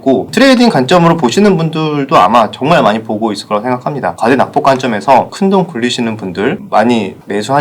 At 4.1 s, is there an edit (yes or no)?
yes